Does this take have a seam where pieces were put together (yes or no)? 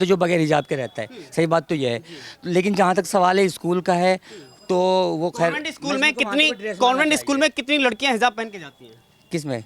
no